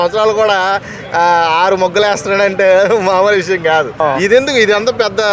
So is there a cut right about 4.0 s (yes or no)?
yes